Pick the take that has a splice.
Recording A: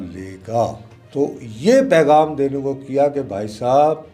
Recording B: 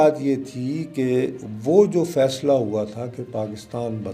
A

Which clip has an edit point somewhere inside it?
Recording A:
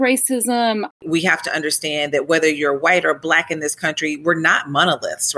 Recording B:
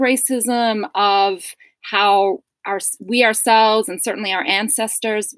A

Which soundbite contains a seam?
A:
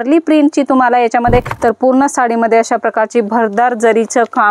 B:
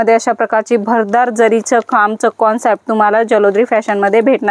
A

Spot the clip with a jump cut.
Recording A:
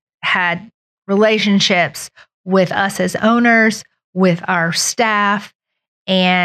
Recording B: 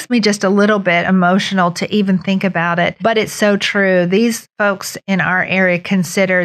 B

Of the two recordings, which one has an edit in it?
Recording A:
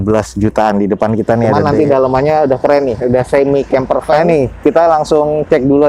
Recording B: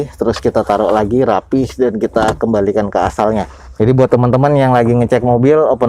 A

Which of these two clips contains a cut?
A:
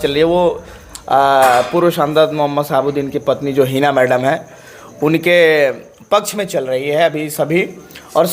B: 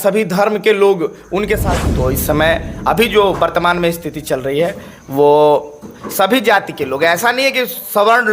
B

